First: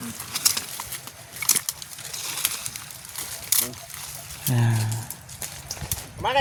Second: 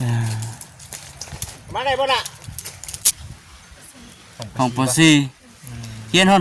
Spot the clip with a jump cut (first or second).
second